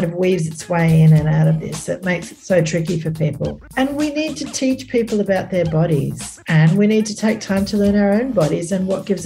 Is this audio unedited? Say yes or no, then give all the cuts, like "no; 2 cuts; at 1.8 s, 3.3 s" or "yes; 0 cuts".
no; 1 cut; at 3.5 s